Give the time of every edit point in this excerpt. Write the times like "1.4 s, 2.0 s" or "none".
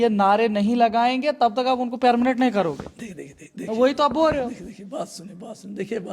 none